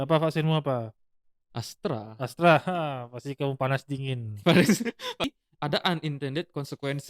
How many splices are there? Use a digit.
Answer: 1